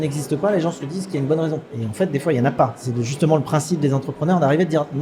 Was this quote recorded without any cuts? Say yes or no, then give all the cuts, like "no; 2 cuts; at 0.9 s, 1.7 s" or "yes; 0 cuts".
no; 2 cuts; at 1.8 s, 2.8 s